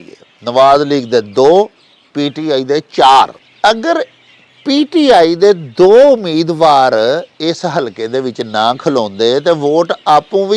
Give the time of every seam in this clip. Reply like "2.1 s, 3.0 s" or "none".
3.4 s